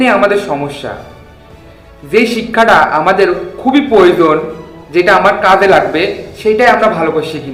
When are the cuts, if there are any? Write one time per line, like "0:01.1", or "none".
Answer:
none